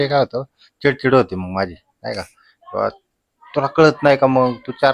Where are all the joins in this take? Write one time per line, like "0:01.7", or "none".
none